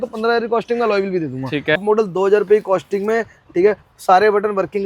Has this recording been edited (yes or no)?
yes